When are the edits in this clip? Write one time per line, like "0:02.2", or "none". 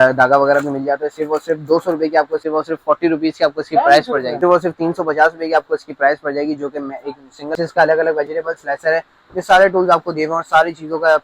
0:02.4
0:04.3
0:07.5